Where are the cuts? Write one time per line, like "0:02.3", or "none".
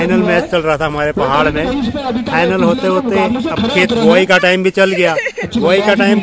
none